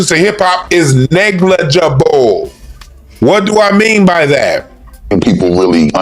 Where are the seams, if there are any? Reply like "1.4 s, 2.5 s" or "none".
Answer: 5.1 s